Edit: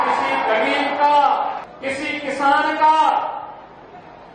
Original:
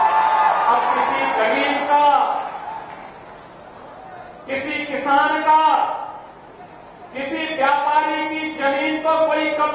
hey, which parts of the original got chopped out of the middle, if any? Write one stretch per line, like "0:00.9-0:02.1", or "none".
0:02.6-0:04.3